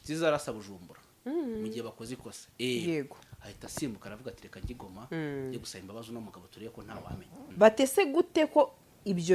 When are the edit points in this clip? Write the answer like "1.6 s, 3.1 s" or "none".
7.4 s